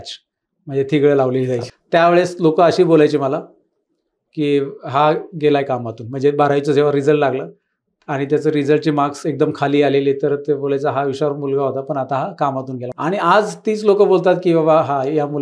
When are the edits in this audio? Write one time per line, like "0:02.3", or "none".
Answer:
0:01.6
0:12.8